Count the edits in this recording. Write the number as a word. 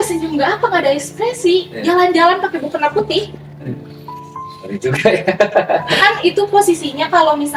zero